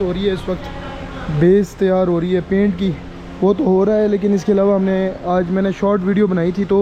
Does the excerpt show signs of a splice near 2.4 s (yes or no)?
no